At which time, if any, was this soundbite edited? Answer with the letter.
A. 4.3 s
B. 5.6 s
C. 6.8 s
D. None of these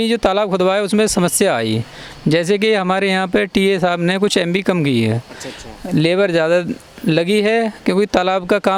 D